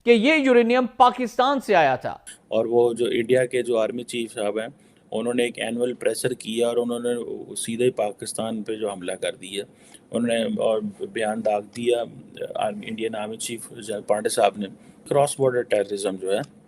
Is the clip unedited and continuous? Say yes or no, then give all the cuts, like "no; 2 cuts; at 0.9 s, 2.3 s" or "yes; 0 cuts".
no; 2 cuts; at 2.5 s, 15.0 s